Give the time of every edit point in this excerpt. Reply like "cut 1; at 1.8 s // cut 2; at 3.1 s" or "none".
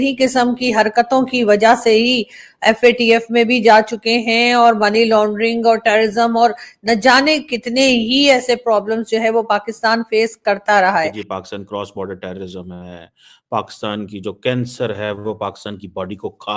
cut 1; at 11.3 s